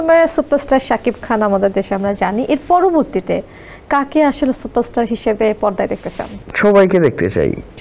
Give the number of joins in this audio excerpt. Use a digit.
0